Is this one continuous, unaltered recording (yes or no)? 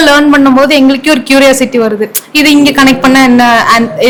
yes